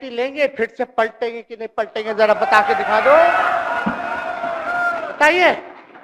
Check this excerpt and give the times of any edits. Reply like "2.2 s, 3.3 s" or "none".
none